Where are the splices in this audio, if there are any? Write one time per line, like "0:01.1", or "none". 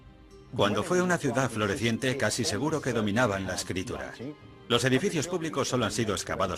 0:04.5